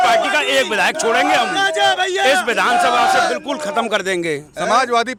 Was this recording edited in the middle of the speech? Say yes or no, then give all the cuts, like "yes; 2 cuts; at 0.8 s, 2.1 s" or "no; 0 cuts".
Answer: no; 0 cuts